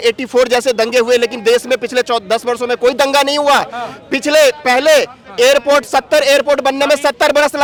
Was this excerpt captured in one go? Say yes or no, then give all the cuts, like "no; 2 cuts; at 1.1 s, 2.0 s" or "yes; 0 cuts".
yes; 0 cuts